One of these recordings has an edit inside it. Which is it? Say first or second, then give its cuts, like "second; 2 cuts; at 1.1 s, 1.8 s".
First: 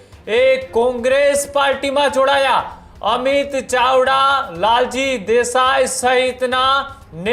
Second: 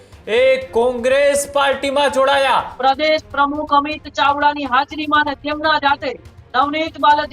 second; 1 cut; at 2.7 s